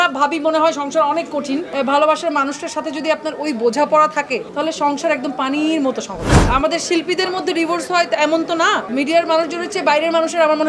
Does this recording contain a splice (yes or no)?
yes